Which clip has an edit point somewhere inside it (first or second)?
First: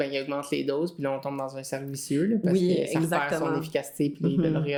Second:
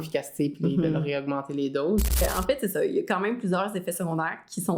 second